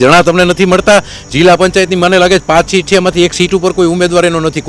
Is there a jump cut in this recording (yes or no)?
no